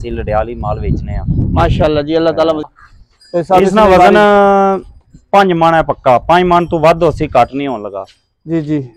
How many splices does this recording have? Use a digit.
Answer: 1